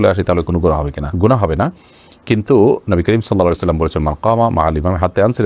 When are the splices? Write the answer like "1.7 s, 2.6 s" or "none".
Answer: none